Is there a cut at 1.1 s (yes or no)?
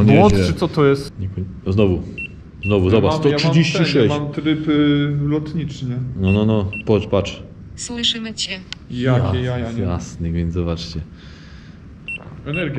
yes